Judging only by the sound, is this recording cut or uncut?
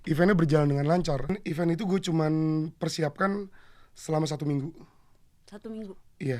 cut